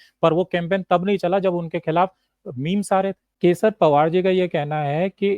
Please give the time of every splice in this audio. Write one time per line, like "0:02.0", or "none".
0:03.3

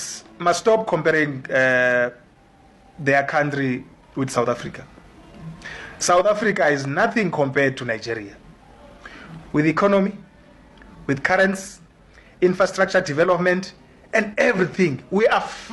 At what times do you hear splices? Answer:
none

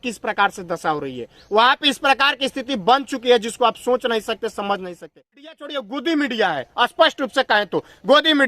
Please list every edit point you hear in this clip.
0:05.5

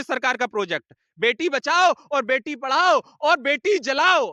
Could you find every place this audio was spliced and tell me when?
none

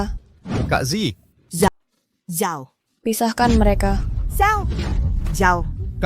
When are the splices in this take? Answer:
0:01.7

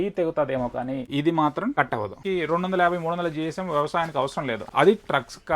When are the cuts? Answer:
0:01.1
0:02.1
0:04.6

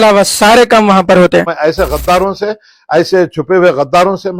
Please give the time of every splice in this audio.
0:01.5

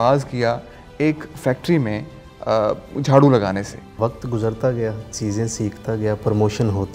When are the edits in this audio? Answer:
0:03.9

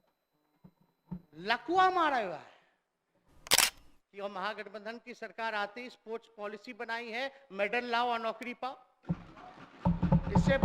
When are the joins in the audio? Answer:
0:03.6

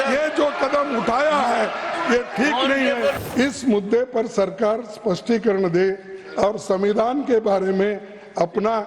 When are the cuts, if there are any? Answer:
0:03.2

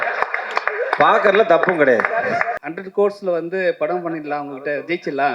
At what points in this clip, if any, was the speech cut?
0:02.6

